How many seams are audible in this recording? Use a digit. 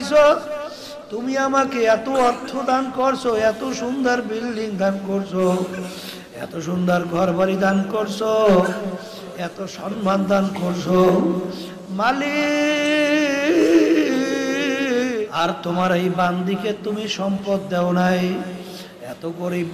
1